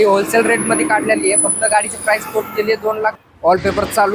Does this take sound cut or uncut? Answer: cut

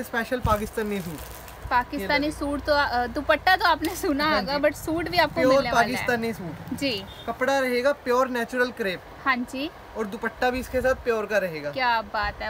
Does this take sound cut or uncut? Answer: uncut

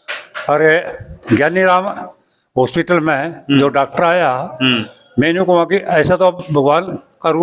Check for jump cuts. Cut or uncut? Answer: uncut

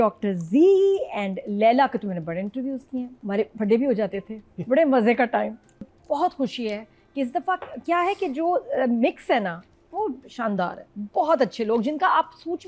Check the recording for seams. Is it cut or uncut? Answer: cut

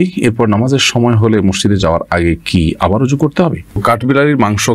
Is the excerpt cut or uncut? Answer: cut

